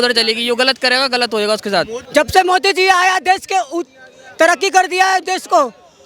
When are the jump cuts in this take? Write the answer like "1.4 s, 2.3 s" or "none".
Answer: 2.0 s